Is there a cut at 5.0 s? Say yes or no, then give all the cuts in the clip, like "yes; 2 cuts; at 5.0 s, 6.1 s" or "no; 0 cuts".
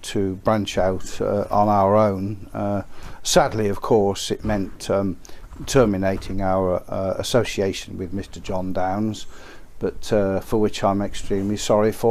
yes; 1 cut; at 5.0 s